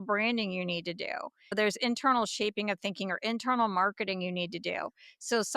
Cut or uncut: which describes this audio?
cut